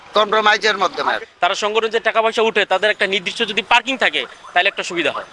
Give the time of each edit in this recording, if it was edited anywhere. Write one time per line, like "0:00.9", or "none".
0:01.2